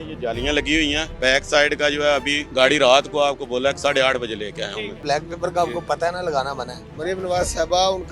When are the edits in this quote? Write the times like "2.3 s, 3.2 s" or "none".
1.1 s, 2.4 s, 5.0 s, 6.7 s